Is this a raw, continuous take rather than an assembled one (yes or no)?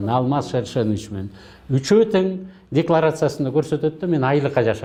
yes